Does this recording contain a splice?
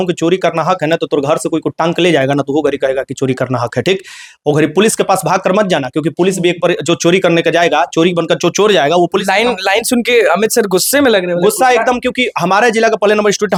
no; 0 cuts

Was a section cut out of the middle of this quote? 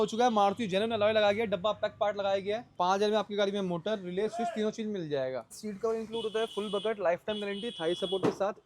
yes; 2 cuts; at 2.7 s, 5.5 s

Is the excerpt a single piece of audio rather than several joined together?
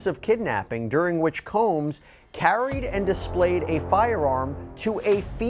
yes; 0 cuts

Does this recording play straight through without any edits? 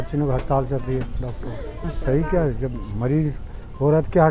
no; 1 cut; at 1.9 s

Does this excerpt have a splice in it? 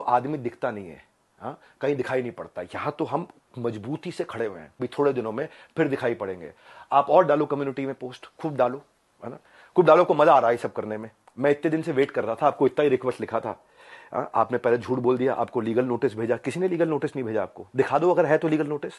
yes; 1 cut; at 4.7 s

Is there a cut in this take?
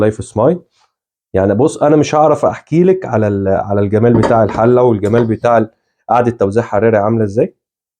no; 0 cuts

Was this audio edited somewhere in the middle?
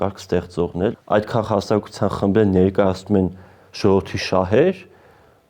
yes; 1 cut; at 0.9 s

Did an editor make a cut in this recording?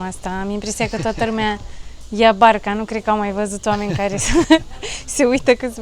no; 0 cuts

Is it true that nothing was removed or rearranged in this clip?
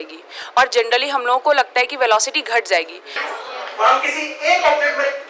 no; 1 cut; at 3.2 s

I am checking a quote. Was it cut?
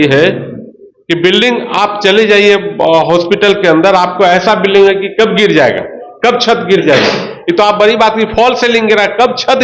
no; 0 cuts

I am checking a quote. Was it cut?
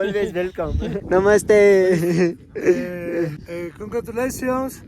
yes; 2 cuts; at 1.0 s, 3.4 s

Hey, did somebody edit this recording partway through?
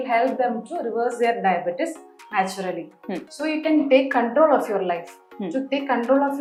no; 0 cuts

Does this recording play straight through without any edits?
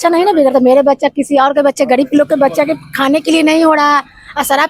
yes; 0 cuts

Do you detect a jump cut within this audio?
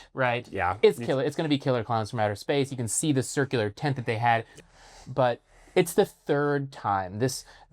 yes; 1 cut; at 4.6 s

